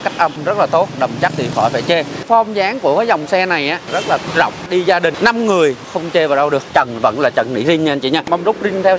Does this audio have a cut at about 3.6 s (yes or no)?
no